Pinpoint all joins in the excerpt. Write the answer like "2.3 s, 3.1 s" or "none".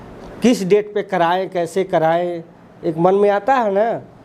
none